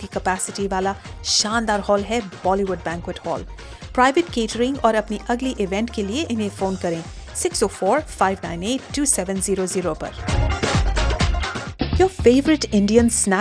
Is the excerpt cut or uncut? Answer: cut